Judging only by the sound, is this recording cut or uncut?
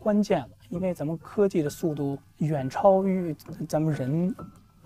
cut